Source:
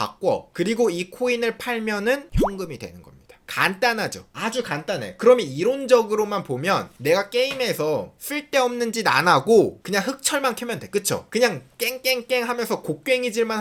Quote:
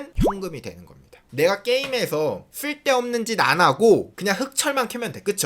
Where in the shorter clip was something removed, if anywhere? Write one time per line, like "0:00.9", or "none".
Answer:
0:01.2